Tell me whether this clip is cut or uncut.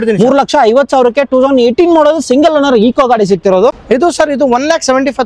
cut